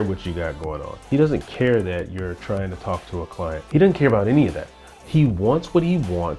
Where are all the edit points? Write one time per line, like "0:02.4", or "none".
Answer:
0:01.0
0:03.0